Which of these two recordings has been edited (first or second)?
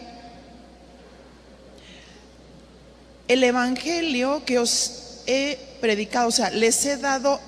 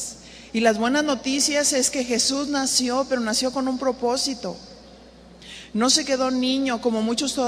first